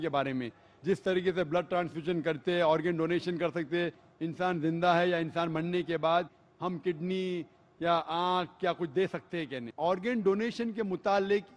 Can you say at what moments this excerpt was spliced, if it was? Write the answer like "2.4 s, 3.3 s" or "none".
9.2 s